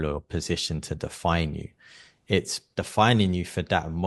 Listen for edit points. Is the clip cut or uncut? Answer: cut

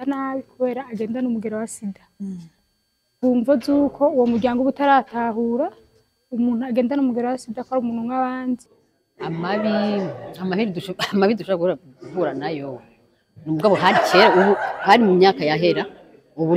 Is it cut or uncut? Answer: cut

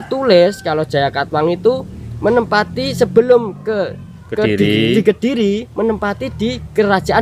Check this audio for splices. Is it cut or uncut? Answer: uncut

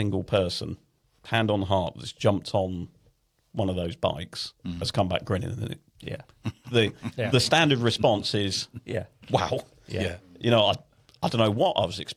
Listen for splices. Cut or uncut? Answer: uncut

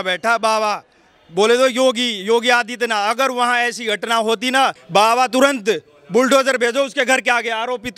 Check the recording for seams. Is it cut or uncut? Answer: cut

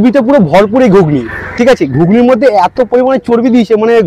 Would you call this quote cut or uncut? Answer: uncut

